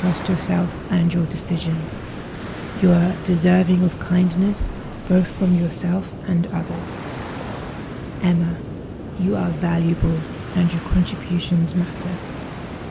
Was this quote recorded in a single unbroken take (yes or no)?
yes